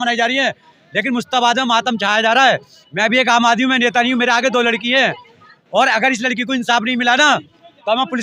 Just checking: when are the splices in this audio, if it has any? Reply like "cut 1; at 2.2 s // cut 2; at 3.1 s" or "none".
none